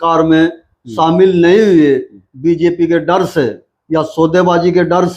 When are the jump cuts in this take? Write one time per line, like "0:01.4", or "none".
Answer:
none